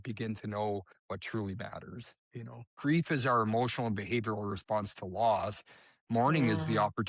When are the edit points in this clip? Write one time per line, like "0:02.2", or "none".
0:00.9
0:02.7